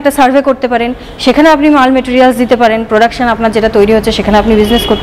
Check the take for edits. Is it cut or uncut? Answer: uncut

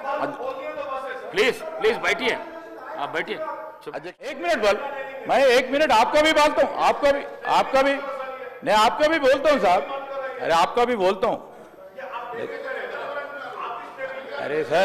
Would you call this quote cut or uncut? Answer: cut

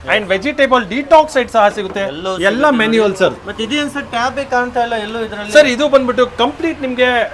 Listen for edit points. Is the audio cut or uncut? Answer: uncut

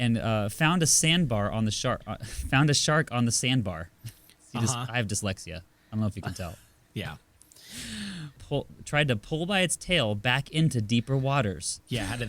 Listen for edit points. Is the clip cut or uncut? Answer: cut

